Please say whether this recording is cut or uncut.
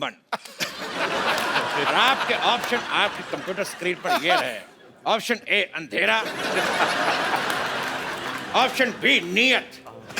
uncut